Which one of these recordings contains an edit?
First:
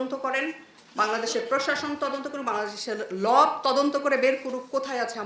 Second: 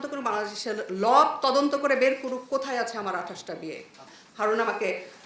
second; 1 cut; at 4.0 s

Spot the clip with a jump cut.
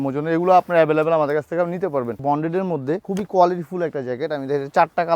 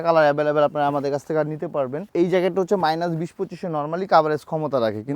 first; 2 cuts; at 2.1 s, 3.0 s

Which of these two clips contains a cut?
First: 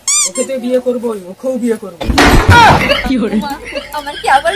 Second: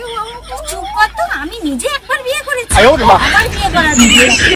first; 1 cut; at 3.0 s

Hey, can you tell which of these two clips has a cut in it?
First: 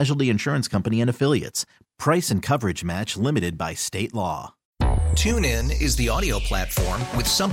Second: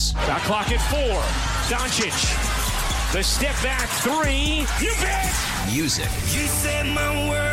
first; 1 cut; at 4.6 s

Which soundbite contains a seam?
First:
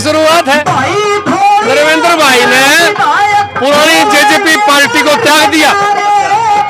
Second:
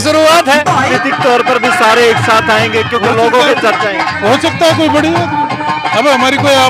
second; 1 cut; at 0.9 s

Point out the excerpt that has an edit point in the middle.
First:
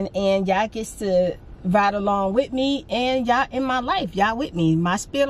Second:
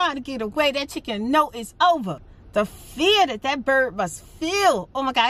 second; 1 cut; at 2.2 s

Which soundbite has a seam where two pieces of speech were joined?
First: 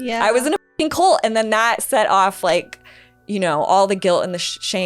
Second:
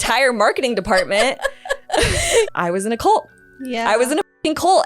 second; 1 cut; at 2.4 s

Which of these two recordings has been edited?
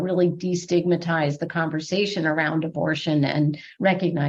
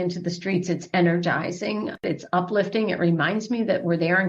second; 1 cut; at 2.0 s

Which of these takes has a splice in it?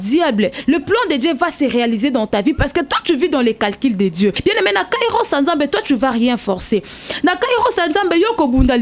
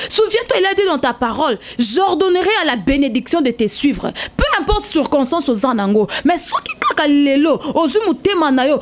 first; 1 cut; at 4.4 s

